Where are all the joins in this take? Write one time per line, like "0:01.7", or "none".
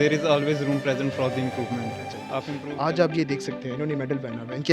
0:02.5